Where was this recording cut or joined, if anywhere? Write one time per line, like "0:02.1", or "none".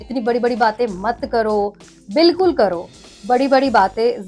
none